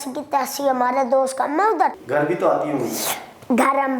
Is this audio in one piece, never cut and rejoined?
no; 1 cut; at 2.0 s

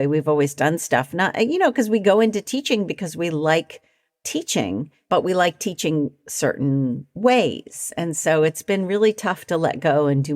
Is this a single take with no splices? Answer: no; 1 cut; at 4.9 s

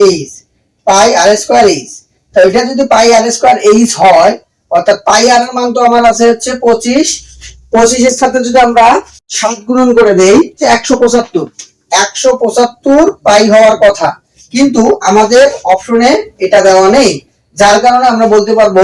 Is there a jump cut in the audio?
yes; 1 cut; at 10.6 s

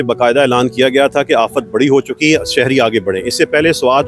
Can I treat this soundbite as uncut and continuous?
yes; 0 cuts

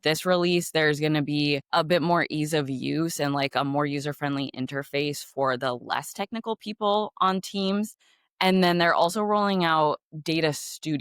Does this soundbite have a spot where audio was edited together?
no; 0 cuts

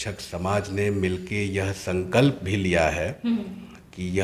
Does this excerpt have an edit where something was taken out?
no; 0 cuts

